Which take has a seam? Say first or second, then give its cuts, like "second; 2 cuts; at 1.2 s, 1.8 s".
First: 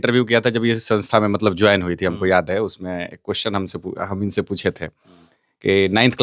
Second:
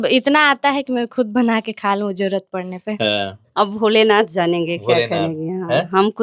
second; 1 cut; at 3.5 s